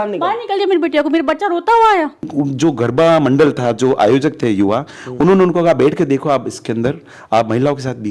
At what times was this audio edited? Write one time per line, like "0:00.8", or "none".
0:02.3